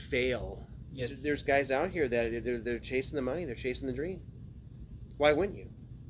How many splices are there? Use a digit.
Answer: 1